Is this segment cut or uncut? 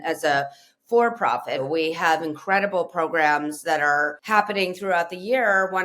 cut